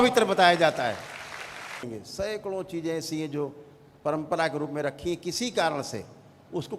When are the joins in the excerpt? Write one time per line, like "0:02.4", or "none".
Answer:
0:01.8